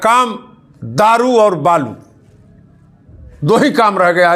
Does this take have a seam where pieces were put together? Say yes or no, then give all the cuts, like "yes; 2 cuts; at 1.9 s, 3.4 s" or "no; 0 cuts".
no; 0 cuts